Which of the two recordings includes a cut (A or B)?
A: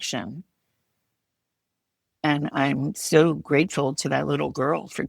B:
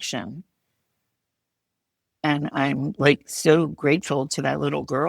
A